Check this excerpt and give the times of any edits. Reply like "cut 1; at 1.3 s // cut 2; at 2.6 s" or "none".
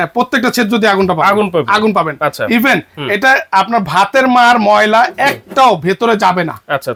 none